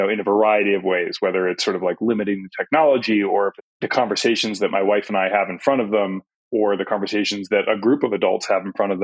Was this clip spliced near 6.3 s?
yes; 2 cuts; at 3.6 s, 6.3 s

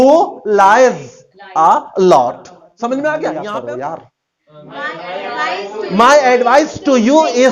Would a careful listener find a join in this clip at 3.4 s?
yes; 1 cut; at 3.4 s

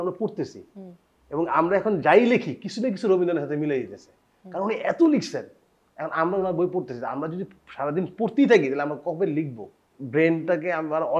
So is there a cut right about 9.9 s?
yes; 1 cut; at 9.9 s

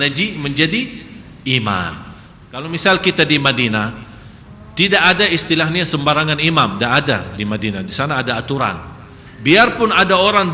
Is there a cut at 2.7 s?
yes; 1 cut; at 2.7 s

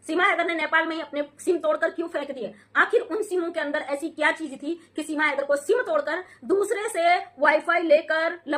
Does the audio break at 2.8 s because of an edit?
no; 0 cuts

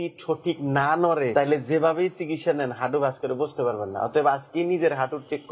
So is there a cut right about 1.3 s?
yes; 1 cut; at 1.3 s

